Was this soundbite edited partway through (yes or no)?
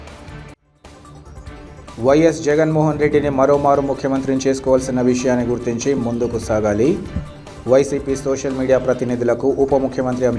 no